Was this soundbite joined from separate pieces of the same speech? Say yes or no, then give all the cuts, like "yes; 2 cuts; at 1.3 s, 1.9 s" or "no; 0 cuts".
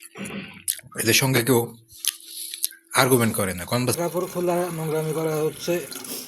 yes; 1 cut; at 4.0 s